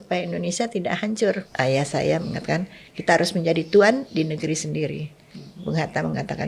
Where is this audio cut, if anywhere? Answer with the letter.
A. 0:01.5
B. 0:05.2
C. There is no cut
A